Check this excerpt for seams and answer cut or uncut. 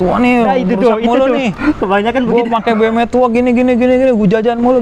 uncut